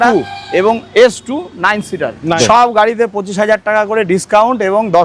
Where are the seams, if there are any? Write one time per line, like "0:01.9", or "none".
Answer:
0:02.4

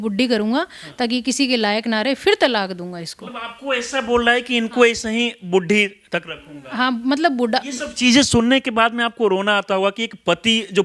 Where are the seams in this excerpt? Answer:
none

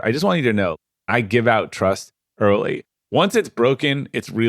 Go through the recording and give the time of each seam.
0:00.9

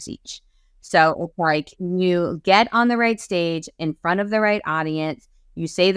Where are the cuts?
none

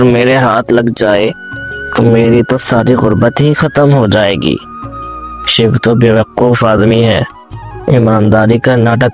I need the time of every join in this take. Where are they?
none

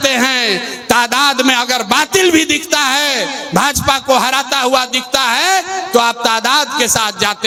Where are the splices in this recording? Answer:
none

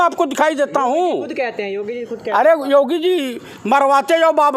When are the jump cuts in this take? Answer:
none

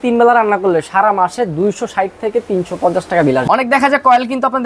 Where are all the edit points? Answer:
0:03.4

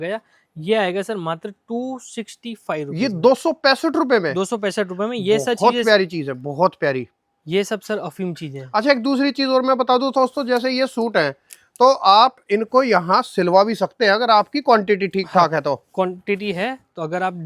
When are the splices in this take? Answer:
none

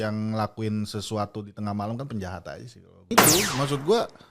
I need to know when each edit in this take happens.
0:03.1

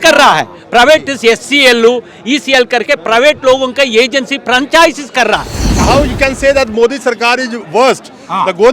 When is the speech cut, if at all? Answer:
0:05.8

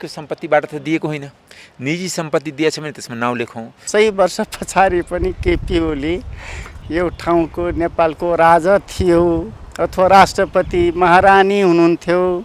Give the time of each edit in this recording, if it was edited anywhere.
0:03.8

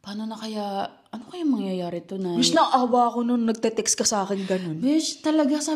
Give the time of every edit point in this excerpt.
none

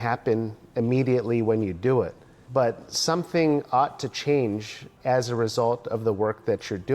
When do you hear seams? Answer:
none

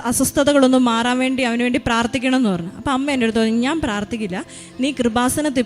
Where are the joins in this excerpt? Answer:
none

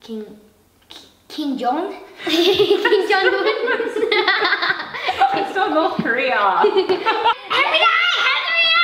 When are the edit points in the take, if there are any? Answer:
0:07.3

